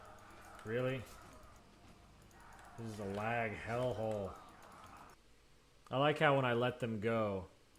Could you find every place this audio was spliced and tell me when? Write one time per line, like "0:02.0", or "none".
0:01.6
0:05.2